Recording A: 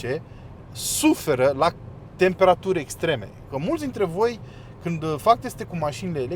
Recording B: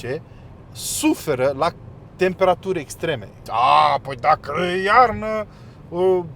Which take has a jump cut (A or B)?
B